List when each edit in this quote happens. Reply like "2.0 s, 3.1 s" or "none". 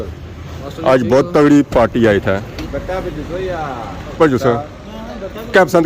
2.6 s, 4.2 s